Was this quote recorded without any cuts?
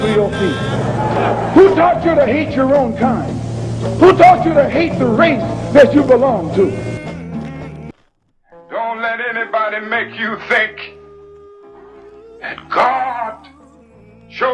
no; 1 cut; at 7.9 s

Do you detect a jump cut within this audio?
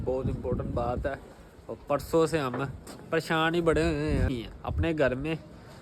yes; 1 cut; at 4.5 s

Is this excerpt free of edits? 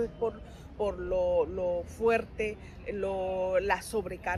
yes; 0 cuts

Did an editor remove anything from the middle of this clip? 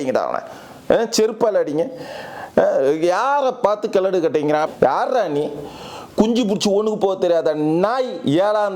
yes; 1 cut; at 4.7 s

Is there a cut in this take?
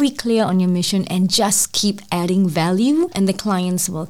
yes; 1 cut; at 3.1 s

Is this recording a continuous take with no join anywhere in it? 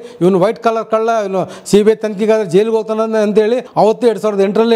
no; 1 cut; at 3.7 s

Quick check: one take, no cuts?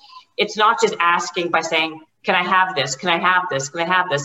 yes; 0 cuts

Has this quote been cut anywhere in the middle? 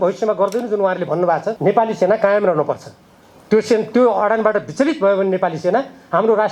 yes; 1 cut; at 1.5 s

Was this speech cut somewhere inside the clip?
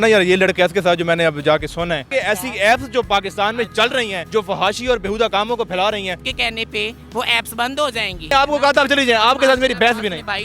yes; 3 cuts; at 2.1 s, 6.3 s, 8.3 s

